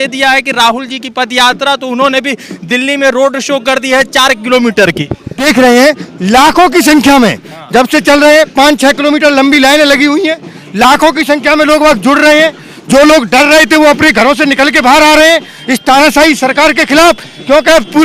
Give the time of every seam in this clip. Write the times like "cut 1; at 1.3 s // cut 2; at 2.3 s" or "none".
cut 1; at 5.4 s